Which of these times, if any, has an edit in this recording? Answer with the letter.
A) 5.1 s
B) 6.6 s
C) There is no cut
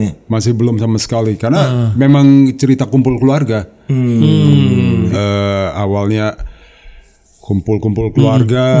A